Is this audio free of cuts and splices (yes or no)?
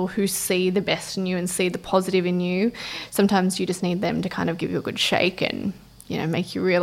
yes